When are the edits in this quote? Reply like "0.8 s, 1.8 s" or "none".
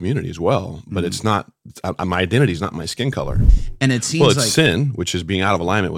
3.6 s